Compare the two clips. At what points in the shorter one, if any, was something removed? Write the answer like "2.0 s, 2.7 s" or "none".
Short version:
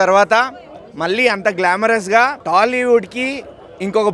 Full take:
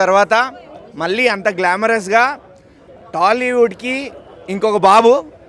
2.4 s